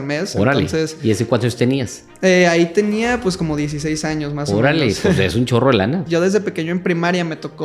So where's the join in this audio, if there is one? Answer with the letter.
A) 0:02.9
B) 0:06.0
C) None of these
B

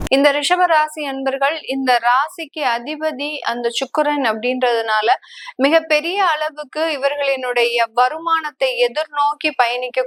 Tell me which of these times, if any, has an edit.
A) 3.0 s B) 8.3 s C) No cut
C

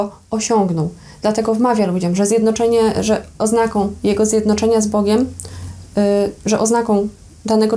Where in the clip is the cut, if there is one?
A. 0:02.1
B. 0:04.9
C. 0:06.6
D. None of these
D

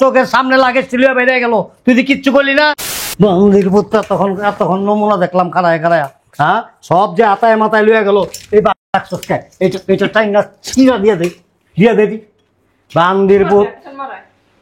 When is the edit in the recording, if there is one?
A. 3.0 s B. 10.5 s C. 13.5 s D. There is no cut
A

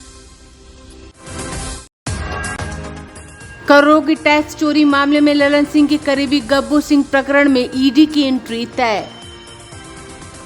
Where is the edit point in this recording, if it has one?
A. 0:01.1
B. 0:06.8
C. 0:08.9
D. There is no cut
A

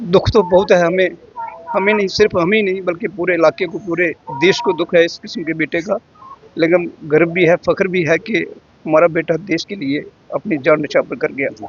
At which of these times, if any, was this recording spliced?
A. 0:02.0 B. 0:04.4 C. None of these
C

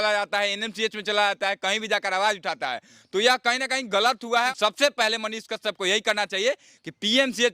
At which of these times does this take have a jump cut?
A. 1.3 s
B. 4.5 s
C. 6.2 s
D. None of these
B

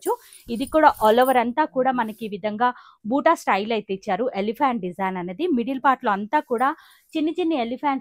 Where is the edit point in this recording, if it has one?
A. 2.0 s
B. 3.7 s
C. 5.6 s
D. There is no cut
D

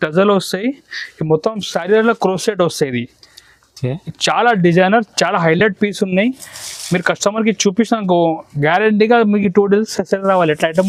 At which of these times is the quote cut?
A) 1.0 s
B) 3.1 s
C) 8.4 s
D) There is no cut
D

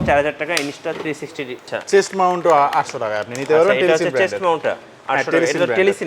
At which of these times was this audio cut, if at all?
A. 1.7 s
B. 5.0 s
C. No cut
A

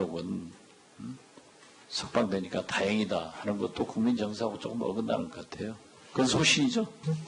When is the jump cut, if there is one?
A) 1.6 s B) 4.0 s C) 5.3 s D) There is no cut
C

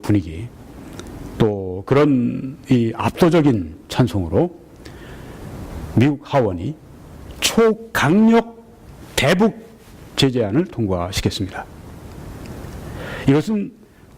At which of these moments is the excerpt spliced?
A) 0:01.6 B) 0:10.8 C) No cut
A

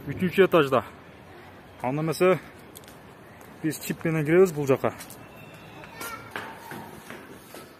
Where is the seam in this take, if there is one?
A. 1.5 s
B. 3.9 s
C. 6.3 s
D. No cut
C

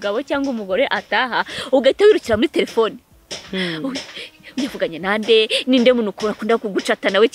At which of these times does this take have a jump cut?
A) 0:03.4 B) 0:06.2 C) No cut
C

